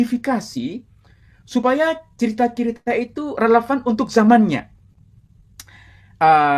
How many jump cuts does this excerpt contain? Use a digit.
0